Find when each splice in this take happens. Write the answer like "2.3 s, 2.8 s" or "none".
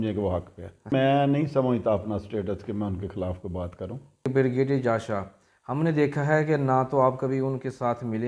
0.9 s, 4.3 s